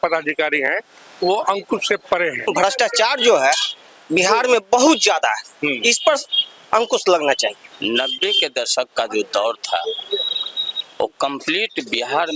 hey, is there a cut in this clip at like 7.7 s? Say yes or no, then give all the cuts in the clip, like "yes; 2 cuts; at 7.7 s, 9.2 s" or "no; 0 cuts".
yes; 2 cuts; at 2.5 s, 7.7 s